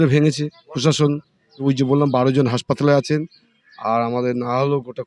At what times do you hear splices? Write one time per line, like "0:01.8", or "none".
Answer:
0:01.6

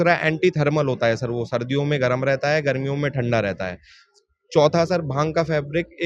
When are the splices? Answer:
none

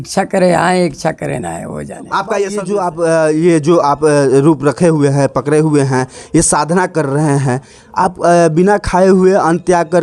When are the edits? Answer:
0:02.6

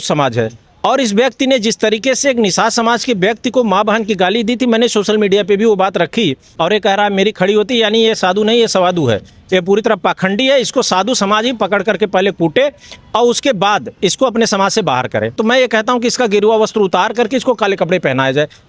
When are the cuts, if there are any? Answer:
0:06.5
0:15.4

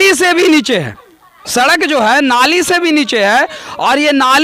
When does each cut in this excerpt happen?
none

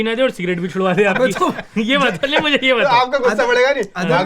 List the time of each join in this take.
none

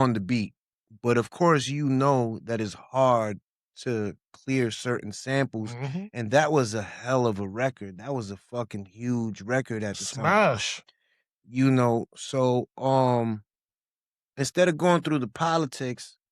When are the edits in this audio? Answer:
none

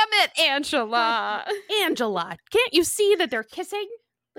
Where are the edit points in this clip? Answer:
0:01.6

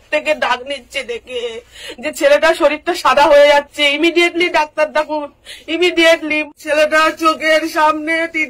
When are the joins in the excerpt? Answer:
0:06.4

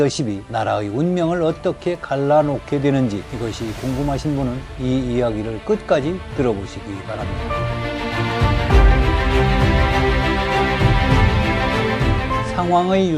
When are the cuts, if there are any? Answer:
none

